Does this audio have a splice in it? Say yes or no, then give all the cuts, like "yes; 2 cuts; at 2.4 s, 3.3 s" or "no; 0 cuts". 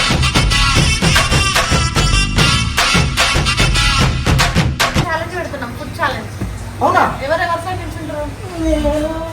yes; 1 cut; at 5.1 s